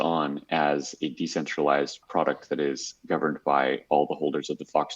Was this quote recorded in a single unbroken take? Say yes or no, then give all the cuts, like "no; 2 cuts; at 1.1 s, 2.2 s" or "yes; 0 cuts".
no; 1 cut; at 2.0 s